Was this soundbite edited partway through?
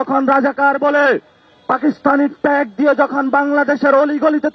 no; 0 cuts

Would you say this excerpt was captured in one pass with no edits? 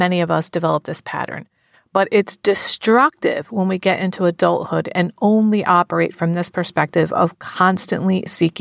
yes; 0 cuts

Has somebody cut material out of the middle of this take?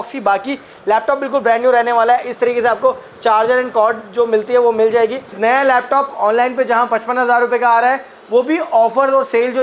yes; 1 cut; at 5.3 s

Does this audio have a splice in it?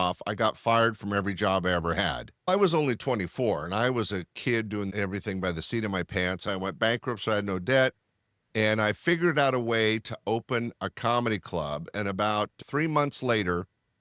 yes; 2 cuts; at 2.3 s, 6.5 s

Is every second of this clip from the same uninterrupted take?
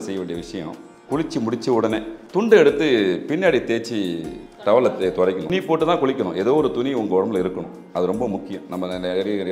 no; 1 cut; at 5.5 s

